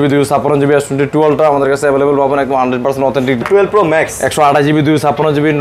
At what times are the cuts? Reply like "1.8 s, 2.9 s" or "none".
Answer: 3.4 s